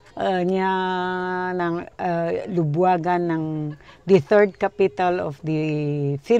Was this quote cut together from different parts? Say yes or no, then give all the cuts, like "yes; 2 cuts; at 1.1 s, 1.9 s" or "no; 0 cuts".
no; 0 cuts